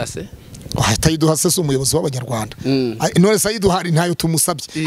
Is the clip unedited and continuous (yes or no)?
yes